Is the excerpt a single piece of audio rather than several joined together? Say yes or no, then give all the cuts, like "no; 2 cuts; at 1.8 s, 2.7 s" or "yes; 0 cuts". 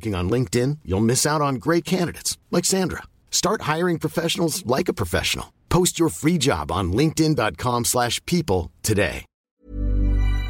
no; 1 cut; at 9.6 s